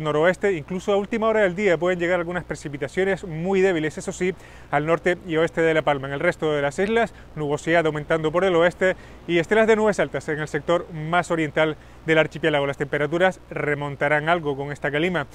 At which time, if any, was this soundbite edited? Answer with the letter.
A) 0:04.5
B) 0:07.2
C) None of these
C